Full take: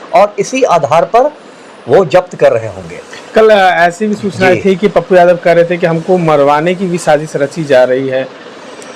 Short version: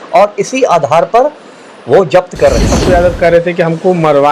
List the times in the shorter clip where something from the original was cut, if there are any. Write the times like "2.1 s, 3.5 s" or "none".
2.7 s